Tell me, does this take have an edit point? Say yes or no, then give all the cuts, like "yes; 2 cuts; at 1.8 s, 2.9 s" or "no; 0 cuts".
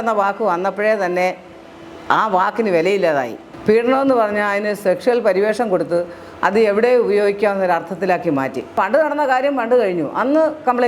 yes; 2 cuts; at 3.5 s, 8.7 s